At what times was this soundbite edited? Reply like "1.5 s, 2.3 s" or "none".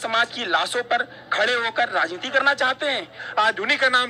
3.2 s